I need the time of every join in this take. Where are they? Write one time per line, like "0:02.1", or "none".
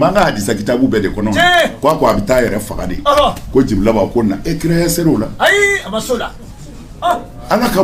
none